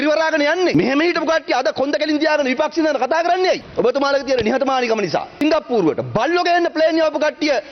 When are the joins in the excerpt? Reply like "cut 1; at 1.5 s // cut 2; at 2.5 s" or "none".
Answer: cut 1; at 0.7 s // cut 2; at 3.7 s // cut 3; at 5.4 s